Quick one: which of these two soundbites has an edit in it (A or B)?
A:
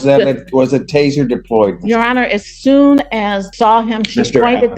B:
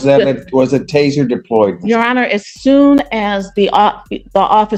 A